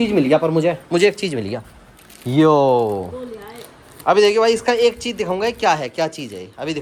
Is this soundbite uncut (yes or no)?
yes